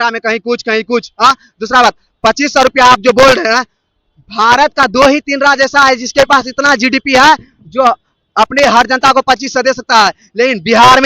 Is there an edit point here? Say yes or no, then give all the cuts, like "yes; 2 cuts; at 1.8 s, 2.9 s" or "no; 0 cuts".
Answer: no; 0 cuts